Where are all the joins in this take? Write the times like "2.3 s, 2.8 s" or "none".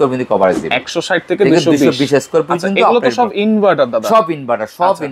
none